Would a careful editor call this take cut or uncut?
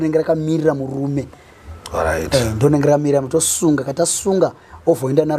uncut